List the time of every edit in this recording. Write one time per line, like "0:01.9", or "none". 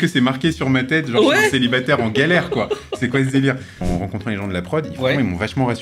0:03.8